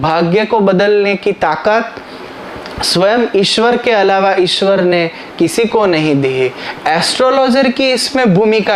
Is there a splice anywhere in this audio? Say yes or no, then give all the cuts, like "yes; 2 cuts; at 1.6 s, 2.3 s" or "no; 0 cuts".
yes; 1 cut; at 6.7 s